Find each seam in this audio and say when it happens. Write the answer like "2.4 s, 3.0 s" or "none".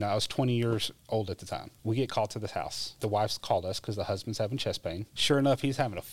1.7 s, 3.0 s, 5.1 s